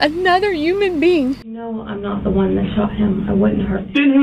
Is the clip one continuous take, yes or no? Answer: no